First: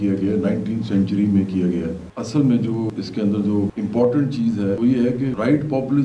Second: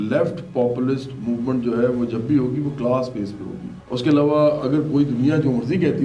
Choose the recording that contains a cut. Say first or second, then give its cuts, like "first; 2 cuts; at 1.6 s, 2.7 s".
first; 4 cuts; at 2.1 s, 2.9 s, 3.7 s, 4.9 s